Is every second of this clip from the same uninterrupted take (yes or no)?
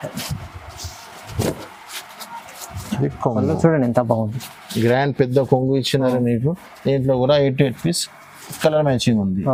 yes